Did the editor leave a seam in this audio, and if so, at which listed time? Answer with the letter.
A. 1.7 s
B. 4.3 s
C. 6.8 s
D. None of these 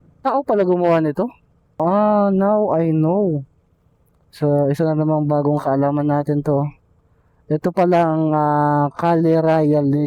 A